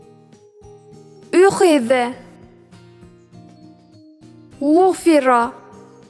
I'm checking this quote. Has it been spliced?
yes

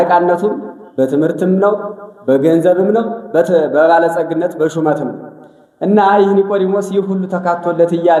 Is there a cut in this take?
no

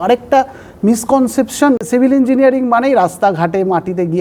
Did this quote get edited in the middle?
yes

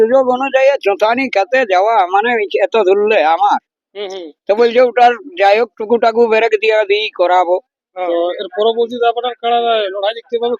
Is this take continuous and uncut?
no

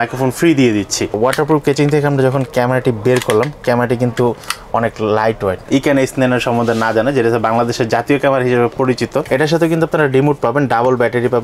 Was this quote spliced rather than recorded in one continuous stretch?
yes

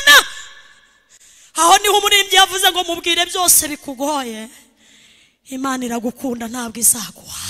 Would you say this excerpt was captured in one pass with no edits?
yes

